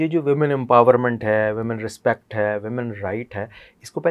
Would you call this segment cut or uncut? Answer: uncut